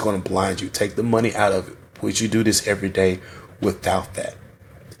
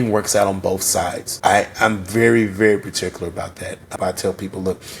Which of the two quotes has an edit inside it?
second; 2 cuts; at 1.2 s, 3.9 s

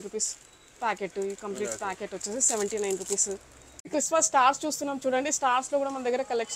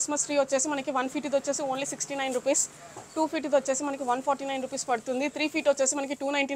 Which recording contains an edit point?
first; 1 cut; at 3.8 s

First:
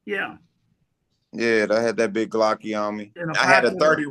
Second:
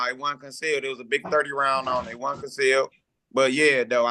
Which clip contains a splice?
first; 1 cut; at 3.2 s

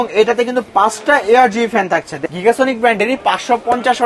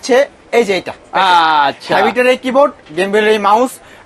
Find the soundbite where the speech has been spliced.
first; 1 cut; at 2.2 s

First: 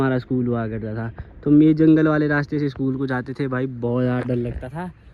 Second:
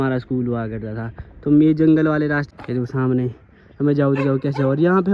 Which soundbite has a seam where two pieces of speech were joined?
second; 1 cut; at 2.5 s

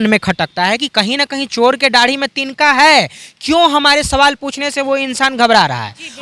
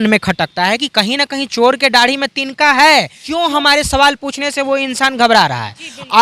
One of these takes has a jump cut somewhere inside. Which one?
second; 1 cut; at 3.2 s

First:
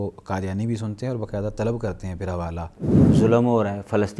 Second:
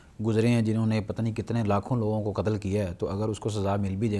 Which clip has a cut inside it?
first; 1 cut; at 2.9 s

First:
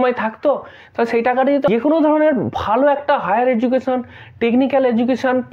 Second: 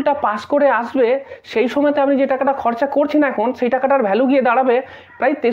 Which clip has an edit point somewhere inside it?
first; 1 cut; at 1.7 s

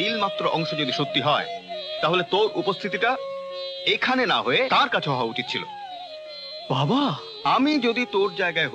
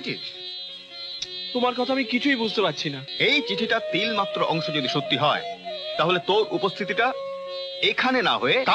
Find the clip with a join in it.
second; 1 cut; at 3.1 s

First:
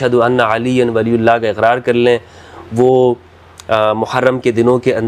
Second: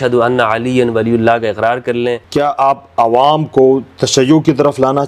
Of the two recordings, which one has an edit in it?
second; 1 cut; at 2.2 s

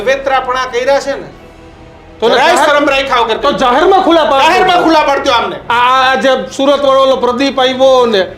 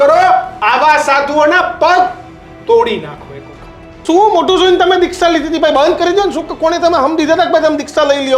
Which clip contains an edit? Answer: second; 1 cut; at 4.0 s

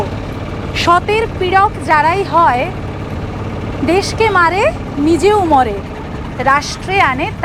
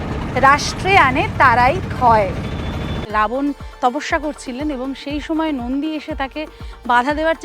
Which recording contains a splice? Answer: second; 1 cut; at 3.1 s

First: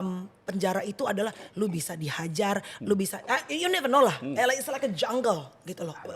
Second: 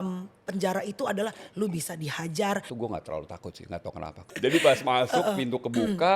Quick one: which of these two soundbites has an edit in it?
second; 2 cuts; at 2.7 s, 4.3 s

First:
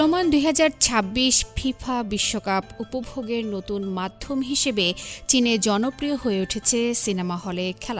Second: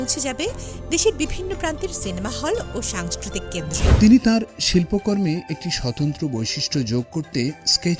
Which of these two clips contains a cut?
second; 1 cut; at 3.9 s

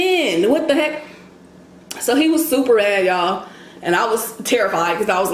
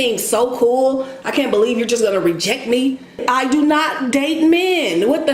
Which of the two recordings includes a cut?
second; 1 cut; at 3.3 s

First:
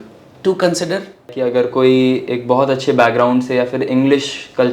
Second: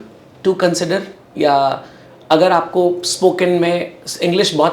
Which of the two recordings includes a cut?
first; 1 cut; at 1.3 s

